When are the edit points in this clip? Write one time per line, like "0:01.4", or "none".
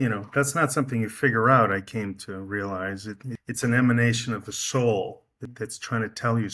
0:03.3
0:05.5